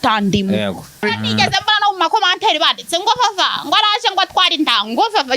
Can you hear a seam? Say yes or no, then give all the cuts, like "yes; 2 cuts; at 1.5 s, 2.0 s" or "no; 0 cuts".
yes; 1 cut; at 1.0 s